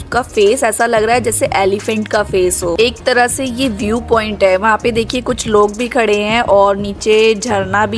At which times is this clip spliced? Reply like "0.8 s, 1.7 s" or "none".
none